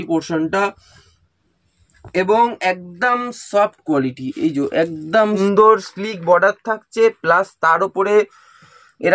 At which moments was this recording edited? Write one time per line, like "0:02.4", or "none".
0:05.3